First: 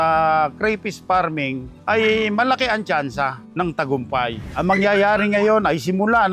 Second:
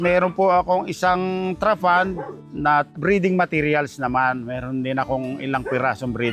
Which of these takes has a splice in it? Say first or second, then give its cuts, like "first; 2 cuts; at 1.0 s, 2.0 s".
first; 1 cut; at 4.4 s